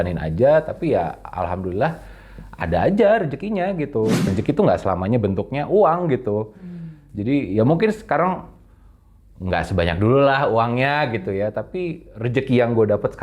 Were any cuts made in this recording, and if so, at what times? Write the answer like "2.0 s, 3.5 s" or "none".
4.3 s